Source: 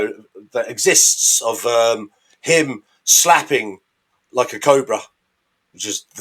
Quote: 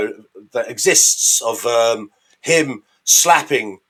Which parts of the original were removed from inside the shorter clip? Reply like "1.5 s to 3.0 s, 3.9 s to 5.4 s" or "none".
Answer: none